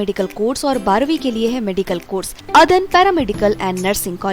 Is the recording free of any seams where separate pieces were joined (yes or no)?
no